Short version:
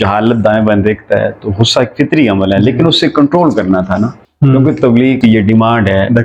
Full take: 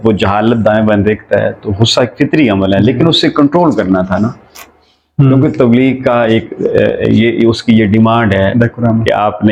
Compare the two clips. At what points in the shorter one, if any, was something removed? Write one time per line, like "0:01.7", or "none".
0:04.2
0:05.2